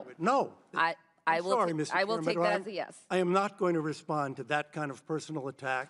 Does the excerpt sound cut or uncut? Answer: uncut